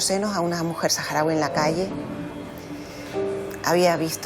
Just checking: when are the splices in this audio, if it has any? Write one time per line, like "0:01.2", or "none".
none

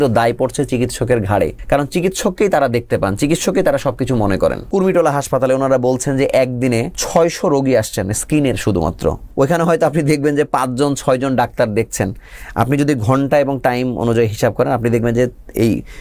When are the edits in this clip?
0:01.6
0:04.7
0:07.0
0:09.2

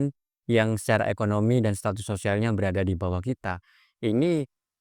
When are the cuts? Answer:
none

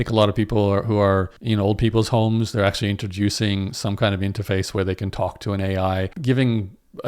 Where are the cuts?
0:06.1

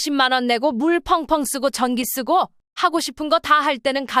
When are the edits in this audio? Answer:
none

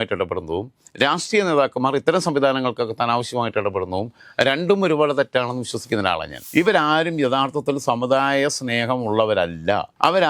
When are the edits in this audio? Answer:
0:06.4

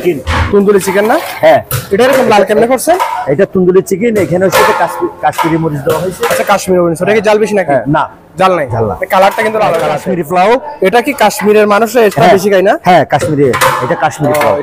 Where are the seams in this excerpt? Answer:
0:10.1

